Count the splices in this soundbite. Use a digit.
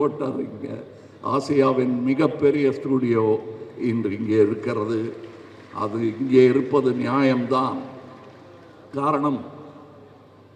0